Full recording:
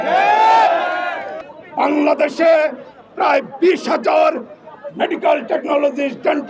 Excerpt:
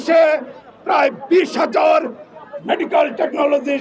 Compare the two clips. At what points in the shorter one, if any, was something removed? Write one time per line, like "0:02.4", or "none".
none